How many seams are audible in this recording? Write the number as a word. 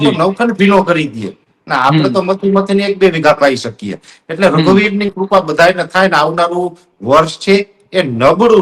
zero